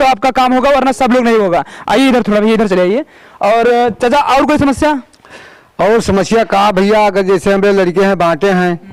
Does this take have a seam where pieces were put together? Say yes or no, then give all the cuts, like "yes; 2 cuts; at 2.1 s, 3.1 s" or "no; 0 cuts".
no; 0 cuts